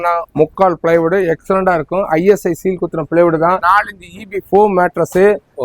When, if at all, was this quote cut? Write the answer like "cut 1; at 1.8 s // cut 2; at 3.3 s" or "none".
cut 1; at 3.6 s